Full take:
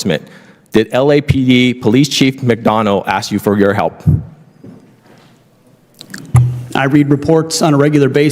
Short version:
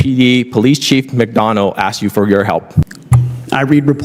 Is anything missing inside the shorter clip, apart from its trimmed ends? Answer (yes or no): yes